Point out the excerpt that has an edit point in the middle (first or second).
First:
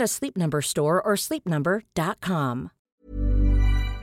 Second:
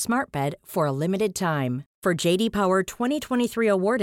first